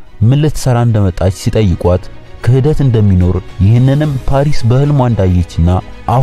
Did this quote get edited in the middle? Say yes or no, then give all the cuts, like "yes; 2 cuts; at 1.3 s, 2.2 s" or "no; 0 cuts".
no; 0 cuts